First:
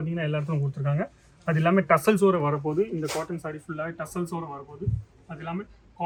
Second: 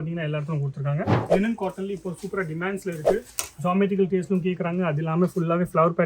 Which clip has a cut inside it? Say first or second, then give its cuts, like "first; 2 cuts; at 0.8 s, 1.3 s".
second; 1 cut; at 1.2 s